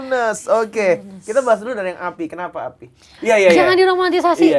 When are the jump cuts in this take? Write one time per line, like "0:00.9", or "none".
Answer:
0:03.1